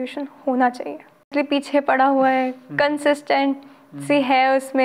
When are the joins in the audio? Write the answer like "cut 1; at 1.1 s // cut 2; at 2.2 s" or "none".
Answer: cut 1; at 1.3 s